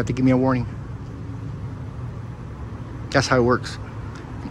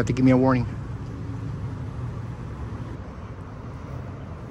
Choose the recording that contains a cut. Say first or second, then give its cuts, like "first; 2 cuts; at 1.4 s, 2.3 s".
second; 1 cut; at 2.9 s